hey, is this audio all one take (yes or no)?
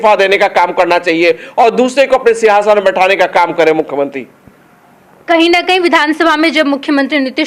yes